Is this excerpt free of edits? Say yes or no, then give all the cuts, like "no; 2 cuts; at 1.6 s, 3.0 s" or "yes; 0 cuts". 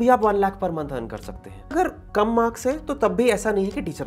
no; 1 cut; at 1.7 s